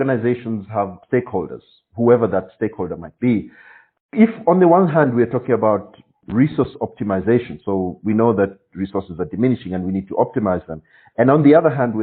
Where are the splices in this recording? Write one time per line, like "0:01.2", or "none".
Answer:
0:01.0